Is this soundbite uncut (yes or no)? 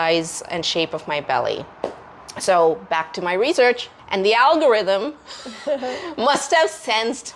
yes